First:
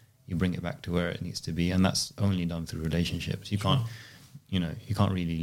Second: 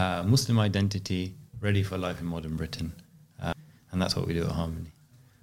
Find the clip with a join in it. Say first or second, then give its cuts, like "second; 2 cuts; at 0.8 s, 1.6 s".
second; 1 cut; at 3.5 s